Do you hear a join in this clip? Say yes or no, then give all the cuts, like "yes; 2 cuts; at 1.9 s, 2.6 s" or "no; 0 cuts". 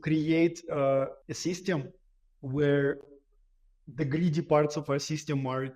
yes; 1 cut; at 1.2 s